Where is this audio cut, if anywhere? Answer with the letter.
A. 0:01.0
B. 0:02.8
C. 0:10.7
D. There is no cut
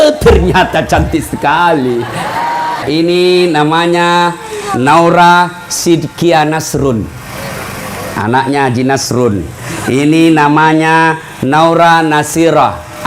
B